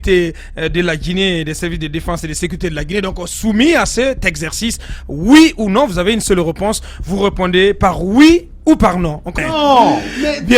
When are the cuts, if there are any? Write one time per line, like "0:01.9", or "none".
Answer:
0:09.4